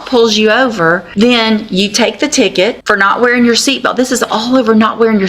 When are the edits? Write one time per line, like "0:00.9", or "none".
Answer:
0:01.1
0:02.8